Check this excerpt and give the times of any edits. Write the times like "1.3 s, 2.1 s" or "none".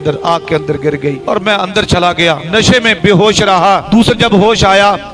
1.2 s, 2.4 s, 3.8 s